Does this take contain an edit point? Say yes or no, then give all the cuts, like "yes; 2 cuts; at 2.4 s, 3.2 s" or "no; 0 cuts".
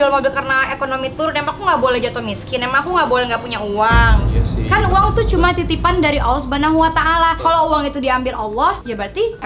no; 0 cuts